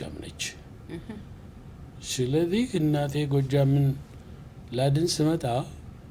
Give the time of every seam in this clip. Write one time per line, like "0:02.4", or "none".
none